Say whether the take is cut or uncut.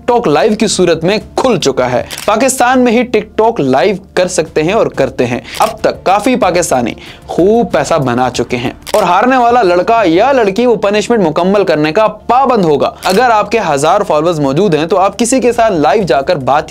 cut